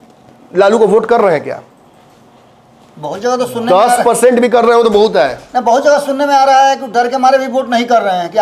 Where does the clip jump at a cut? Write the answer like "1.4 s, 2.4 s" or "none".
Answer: none